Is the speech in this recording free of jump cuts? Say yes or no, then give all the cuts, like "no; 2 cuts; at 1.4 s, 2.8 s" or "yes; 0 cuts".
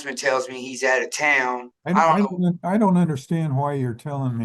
no; 1 cut; at 1.8 s